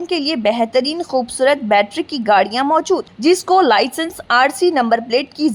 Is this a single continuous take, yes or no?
yes